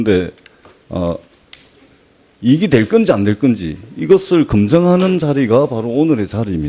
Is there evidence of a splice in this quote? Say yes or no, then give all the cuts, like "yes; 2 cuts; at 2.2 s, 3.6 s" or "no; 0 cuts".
yes; 1 cut; at 4.6 s